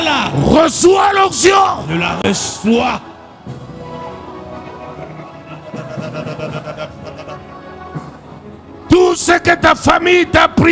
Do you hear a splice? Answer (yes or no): no